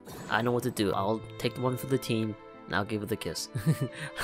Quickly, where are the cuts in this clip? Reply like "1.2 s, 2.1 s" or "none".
0.9 s